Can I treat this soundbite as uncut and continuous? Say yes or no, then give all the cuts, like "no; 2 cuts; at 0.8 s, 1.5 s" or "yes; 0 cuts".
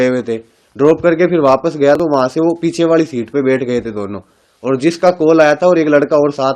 no; 1 cut; at 2.0 s